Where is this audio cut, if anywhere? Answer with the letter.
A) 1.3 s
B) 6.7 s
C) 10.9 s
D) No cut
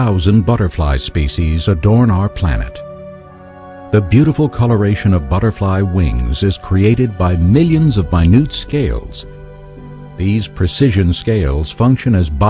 A